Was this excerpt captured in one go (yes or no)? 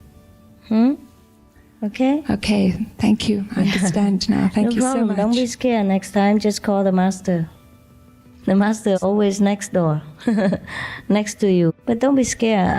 no